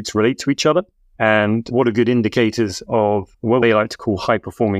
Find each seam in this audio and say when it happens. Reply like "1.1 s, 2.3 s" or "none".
1.0 s, 2.9 s